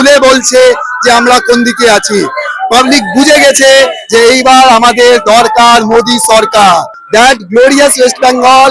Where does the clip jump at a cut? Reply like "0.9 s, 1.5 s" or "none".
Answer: 7.0 s